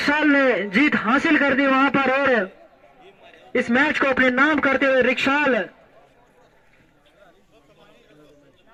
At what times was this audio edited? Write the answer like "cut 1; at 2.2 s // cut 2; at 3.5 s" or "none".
none